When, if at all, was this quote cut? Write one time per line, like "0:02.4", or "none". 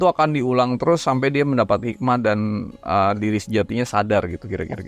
none